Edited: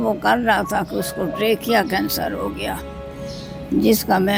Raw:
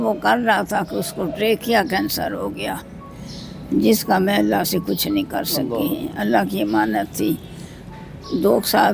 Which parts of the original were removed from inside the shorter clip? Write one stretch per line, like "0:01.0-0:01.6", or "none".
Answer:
none